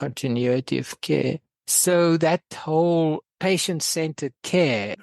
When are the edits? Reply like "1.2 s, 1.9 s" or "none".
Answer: 3.3 s